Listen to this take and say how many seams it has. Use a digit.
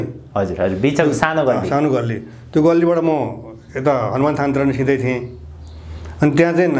0